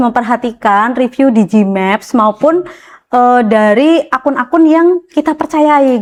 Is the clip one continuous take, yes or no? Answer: yes